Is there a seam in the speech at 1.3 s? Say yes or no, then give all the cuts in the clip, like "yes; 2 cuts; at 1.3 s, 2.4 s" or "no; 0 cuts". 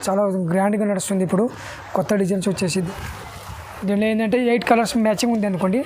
no; 1 cut; at 2.9 s